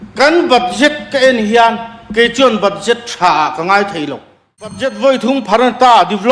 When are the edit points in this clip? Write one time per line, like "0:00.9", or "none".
0:04.9